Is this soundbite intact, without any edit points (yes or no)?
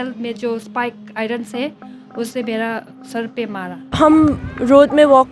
no